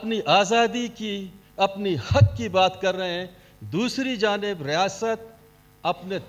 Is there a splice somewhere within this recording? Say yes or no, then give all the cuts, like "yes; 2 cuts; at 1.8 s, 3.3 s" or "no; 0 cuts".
no; 0 cuts